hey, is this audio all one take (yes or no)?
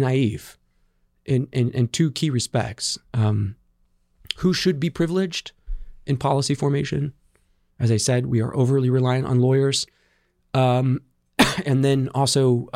yes